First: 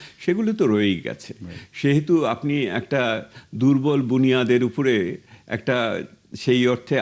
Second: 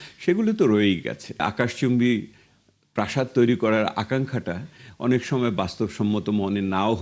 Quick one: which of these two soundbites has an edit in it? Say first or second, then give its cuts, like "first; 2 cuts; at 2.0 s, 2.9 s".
second; 1 cut; at 1.5 s